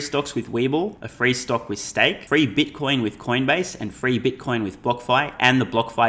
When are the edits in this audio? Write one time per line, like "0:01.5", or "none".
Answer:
0:01.0
0:02.2